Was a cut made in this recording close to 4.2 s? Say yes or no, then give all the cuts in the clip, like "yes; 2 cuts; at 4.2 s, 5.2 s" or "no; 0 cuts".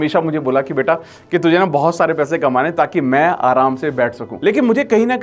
yes; 1 cut; at 4.2 s